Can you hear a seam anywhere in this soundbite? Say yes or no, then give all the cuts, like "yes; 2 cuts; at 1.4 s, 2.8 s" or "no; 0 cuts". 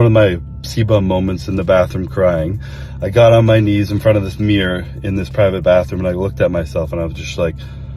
no; 0 cuts